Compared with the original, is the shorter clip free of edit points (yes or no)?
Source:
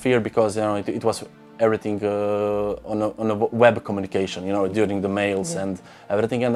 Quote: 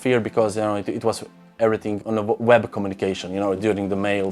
no